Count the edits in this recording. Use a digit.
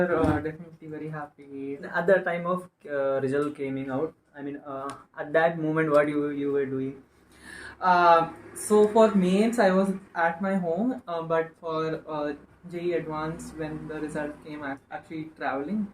2